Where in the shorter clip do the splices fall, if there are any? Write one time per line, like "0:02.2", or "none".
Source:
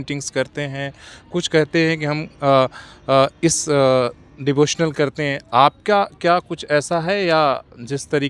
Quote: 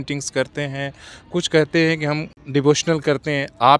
0:02.3